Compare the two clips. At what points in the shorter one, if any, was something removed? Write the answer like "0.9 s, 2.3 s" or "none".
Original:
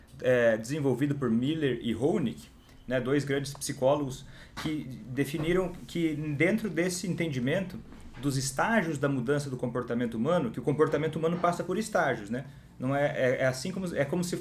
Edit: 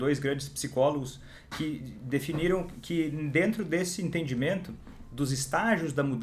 none